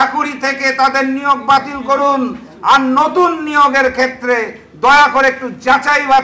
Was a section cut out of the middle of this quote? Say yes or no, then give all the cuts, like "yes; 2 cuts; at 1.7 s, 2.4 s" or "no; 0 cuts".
no; 0 cuts